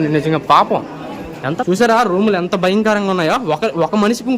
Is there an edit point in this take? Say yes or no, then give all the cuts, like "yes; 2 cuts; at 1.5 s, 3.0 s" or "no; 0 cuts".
yes; 1 cut; at 1.5 s